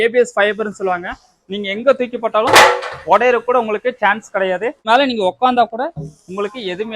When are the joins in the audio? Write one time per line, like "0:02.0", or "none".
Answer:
0:04.9